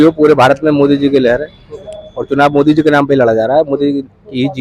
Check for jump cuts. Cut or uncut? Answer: uncut